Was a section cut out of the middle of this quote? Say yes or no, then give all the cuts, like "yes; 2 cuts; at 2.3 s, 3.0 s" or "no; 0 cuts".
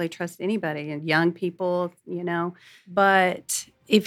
yes; 1 cut; at 2.8 s